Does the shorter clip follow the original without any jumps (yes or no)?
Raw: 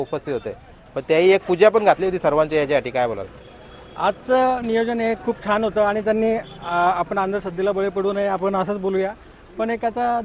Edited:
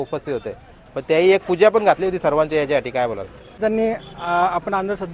no